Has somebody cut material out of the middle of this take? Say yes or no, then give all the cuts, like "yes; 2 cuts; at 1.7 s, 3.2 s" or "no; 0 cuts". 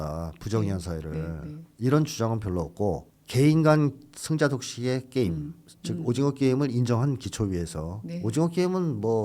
no; 0 cuts